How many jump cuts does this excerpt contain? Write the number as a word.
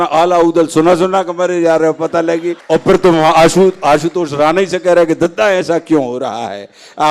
one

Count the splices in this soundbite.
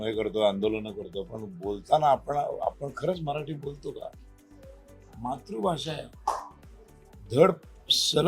zero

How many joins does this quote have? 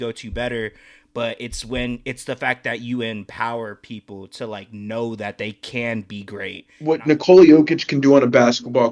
one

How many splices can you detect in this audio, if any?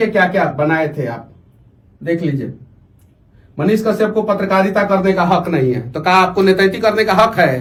zero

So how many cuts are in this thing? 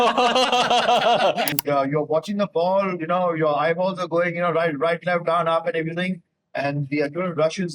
one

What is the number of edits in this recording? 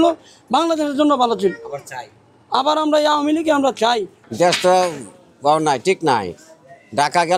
one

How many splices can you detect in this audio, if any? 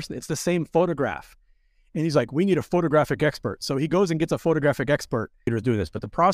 one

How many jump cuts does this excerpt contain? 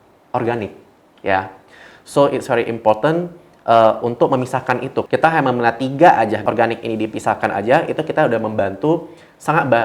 two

